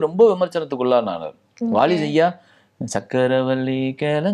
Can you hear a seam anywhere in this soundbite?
no; 0 cuts

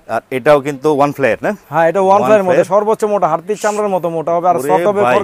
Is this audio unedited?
yes; 0 cuts

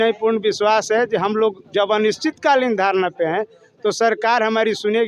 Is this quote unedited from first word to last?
yes; 0 cuts

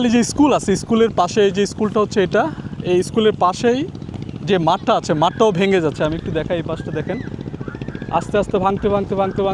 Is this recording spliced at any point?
no; 0 cuts

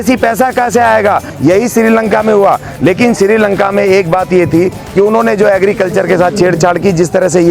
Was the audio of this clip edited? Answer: yes; 1 cut; at 1.3 s

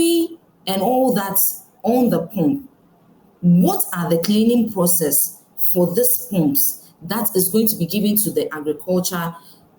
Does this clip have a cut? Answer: no; 0 cuts

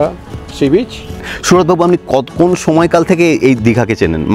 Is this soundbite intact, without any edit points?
no; 1 cut; at 1.3 s

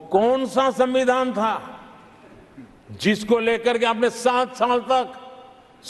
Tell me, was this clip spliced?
no; 0 cuts

